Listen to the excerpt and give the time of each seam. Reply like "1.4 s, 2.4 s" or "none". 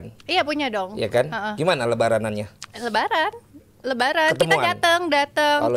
none